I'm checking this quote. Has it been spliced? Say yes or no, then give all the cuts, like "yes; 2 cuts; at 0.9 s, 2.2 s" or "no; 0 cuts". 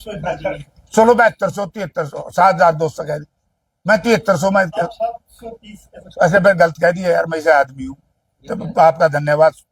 no; 0 cuts